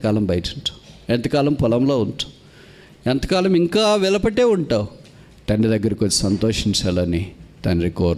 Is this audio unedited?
yes; 0 cuts

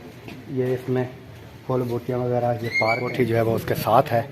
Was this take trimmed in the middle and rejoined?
yes; 1 cut; at 2.8 s

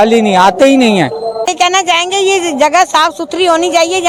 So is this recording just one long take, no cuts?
no; 1 cut; at 1.5 s

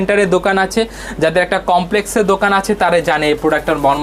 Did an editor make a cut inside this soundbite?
no; 0 cuts

